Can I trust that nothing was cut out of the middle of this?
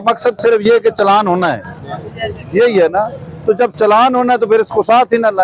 yes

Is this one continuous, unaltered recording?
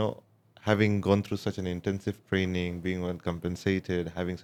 yes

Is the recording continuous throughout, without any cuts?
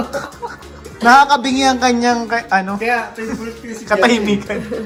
yes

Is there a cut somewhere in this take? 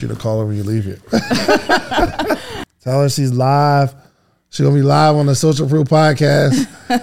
yes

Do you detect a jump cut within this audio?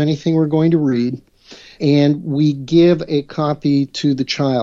no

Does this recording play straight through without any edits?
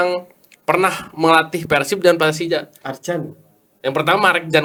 yes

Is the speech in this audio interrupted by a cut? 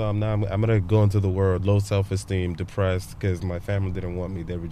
yes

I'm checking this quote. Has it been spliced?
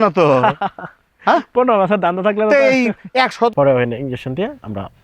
yes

